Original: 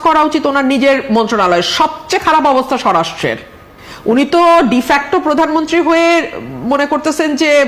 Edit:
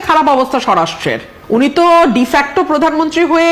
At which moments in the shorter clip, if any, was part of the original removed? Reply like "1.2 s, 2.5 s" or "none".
1.3 s

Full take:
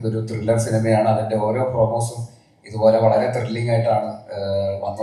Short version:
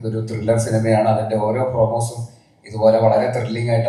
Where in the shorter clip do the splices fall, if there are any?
none

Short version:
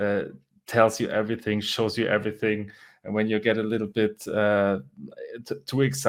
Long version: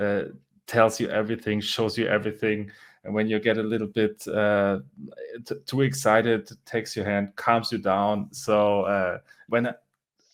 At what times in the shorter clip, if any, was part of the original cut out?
none

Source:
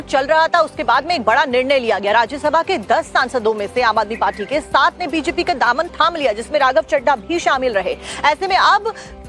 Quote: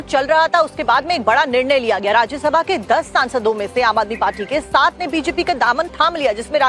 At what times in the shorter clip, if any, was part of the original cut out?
none

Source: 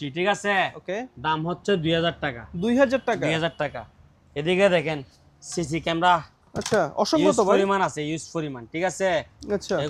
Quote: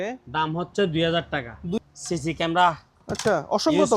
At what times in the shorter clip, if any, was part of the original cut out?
1.8 s

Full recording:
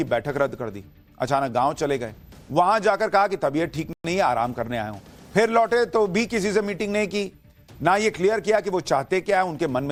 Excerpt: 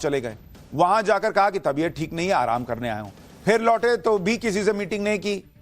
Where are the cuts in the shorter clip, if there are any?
2.1 s

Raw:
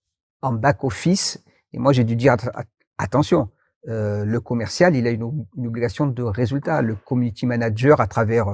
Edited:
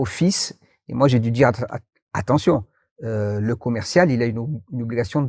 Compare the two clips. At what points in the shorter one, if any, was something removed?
none

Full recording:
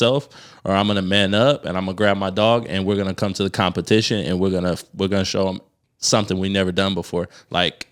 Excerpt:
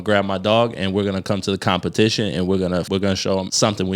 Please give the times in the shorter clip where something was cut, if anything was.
3.0 s

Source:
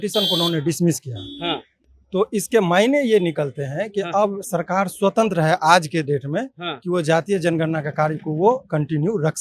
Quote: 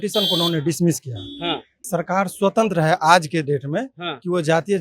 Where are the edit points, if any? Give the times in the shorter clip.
1.8 s

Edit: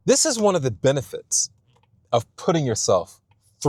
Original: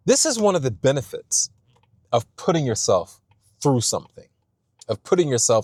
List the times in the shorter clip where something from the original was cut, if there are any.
none

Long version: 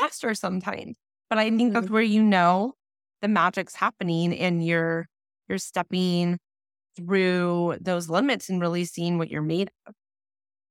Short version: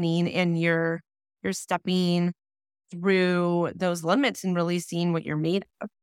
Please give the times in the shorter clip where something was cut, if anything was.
none

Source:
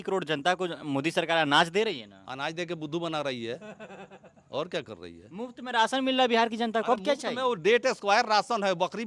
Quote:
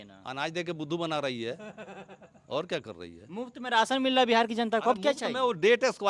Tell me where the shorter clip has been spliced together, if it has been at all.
none

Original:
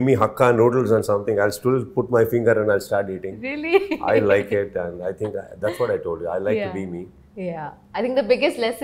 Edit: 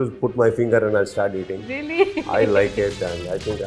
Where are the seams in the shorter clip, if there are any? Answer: none

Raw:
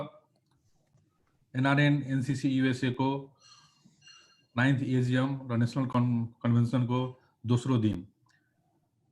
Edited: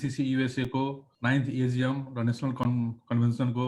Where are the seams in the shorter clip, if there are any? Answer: 1.1 s

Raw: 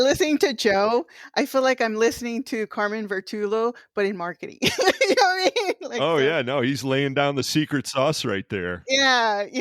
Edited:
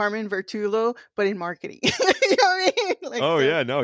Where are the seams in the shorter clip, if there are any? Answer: none

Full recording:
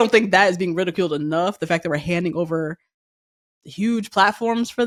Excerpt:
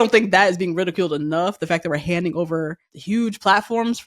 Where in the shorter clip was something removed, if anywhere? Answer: 2.9 s

